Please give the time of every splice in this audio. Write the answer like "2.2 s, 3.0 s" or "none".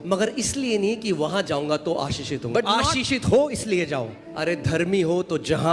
4.2 s